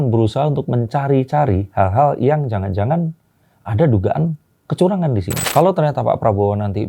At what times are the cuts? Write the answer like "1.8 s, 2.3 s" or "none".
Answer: 5.3 s